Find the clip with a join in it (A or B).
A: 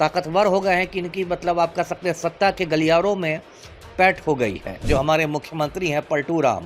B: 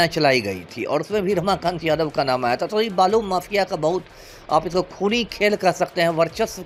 A